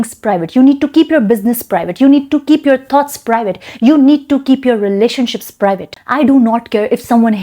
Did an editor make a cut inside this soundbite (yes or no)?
yes